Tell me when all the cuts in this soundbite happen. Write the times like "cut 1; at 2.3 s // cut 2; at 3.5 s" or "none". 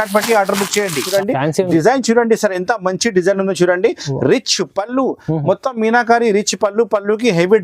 cut 1; at 1.1 s